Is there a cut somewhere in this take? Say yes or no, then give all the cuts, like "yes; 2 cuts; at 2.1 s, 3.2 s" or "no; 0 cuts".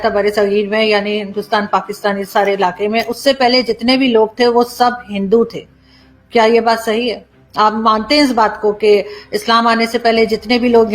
no; 0 cuts